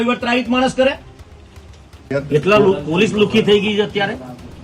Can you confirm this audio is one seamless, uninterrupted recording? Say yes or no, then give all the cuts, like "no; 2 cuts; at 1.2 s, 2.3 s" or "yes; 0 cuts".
yes; 0 cuts